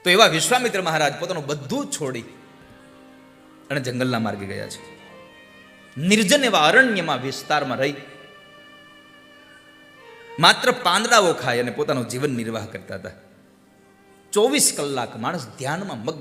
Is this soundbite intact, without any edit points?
yes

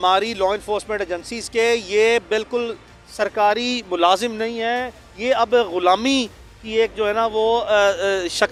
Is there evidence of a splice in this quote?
no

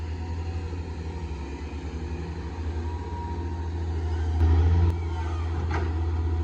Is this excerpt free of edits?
yes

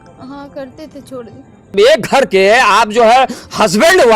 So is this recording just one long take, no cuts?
no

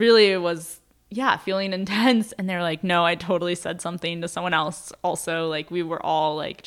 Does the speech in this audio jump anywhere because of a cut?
no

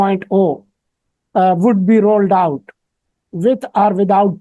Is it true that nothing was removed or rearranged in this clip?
yes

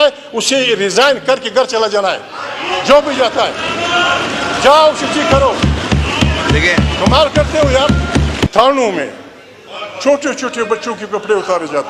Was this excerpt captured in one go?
no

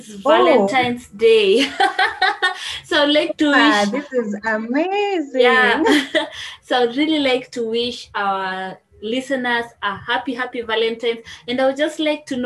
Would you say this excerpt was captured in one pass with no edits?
yes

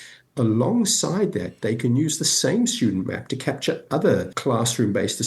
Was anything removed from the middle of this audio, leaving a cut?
yes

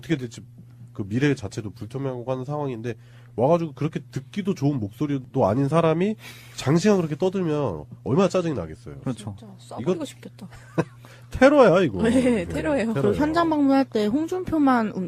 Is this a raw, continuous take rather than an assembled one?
no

